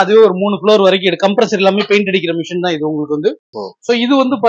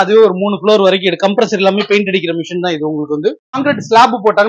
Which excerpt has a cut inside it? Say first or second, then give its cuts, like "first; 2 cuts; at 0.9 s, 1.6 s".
second; 1 cut; at 3.5 s